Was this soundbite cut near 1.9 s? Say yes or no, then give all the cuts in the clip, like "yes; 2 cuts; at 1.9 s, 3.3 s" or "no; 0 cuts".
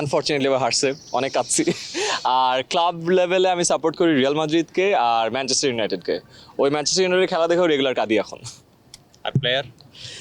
no; 0 cuts